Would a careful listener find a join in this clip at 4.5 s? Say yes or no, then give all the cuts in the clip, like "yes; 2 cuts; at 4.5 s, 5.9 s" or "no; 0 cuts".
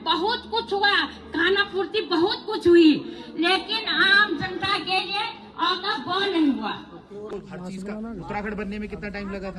no; 1 cut; at 7.3 s